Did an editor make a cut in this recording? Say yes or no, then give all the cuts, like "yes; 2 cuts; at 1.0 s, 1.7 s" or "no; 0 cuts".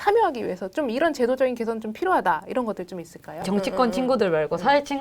yes; 1 cut; at 3.4 s